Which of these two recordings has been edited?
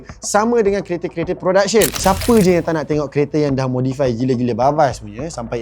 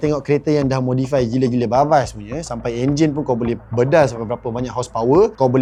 first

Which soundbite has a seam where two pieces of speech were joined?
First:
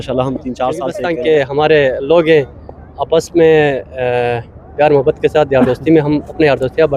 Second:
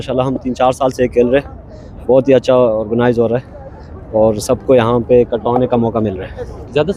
first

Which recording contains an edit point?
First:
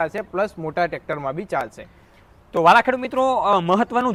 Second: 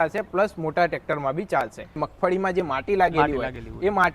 second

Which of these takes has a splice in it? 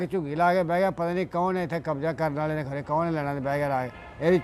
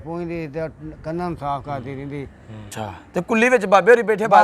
second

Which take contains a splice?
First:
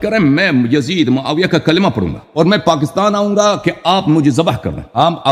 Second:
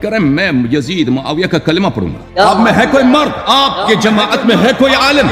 second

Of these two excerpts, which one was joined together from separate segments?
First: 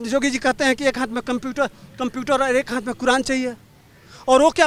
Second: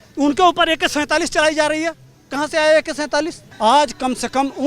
second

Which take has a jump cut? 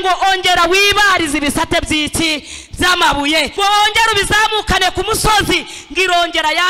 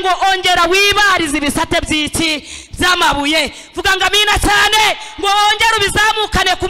first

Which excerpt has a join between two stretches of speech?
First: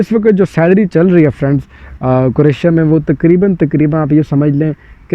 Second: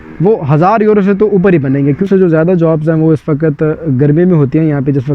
second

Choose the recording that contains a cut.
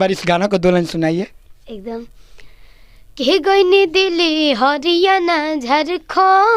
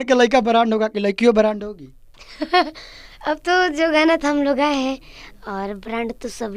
first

